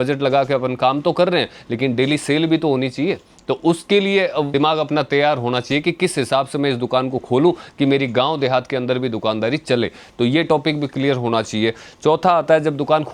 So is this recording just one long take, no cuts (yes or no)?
yes